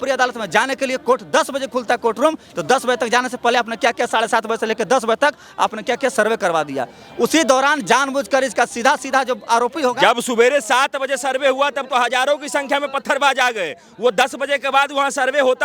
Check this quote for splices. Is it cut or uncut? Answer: uncut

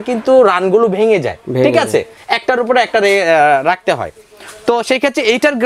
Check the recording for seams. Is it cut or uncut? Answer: uncut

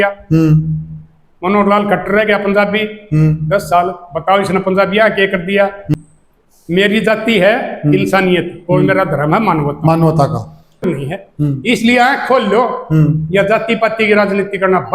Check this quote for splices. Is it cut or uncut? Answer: cut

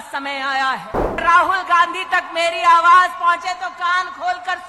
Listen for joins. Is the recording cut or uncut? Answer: cut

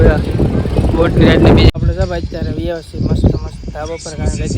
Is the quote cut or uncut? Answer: cut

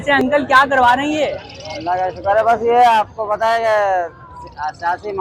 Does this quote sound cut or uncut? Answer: uncut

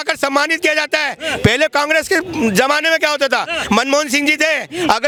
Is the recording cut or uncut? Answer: uncut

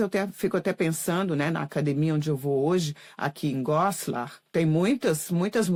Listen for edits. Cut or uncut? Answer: uncut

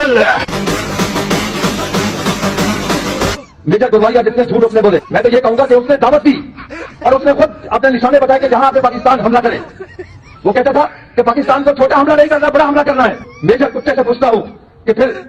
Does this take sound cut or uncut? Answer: uncut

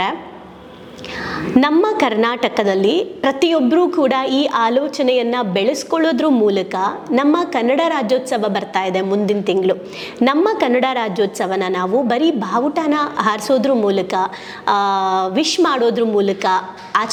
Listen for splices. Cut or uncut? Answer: uncut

